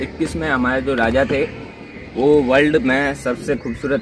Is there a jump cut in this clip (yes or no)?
no